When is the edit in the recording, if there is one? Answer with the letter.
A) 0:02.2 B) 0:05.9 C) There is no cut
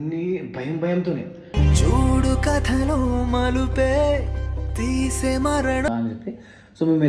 B